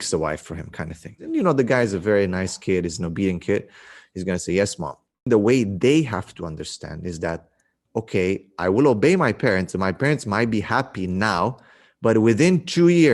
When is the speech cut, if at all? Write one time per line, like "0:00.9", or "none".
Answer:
0:01.2
0:05.3